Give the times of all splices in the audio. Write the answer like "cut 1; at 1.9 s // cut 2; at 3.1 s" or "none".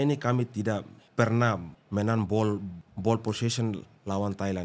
cut 1; at 1.0 s // cut 2; at 1.8 s // cut 3; at 2.8 s